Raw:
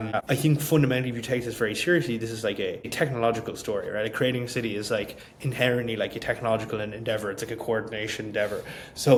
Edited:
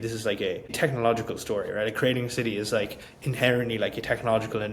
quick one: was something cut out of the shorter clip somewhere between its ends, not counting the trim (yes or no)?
no